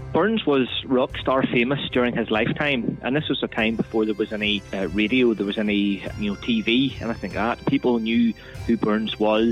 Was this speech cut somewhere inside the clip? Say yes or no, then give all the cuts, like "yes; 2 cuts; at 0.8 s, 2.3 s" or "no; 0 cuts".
yes; 2 cuts; at 4.7 s, 6.1 s